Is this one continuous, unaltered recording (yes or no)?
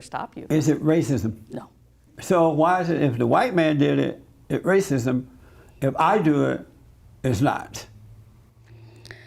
no